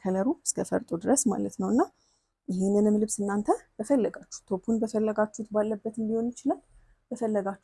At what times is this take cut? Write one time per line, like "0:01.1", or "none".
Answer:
none